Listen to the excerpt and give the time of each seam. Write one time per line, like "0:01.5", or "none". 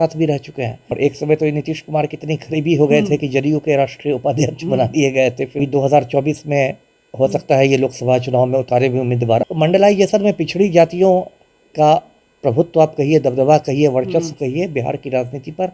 0:00.8
0:05.6
0:09.4

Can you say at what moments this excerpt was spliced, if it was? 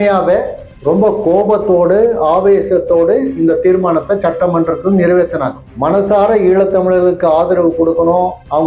none

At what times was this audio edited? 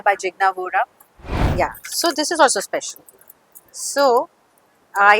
0:01.4

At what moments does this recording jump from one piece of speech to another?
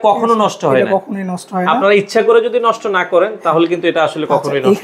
none

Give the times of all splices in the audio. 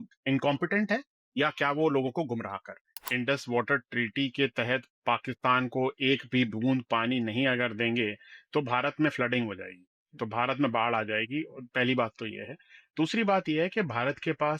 0:03.0

